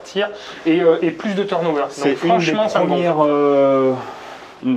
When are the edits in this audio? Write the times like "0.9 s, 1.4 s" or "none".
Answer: none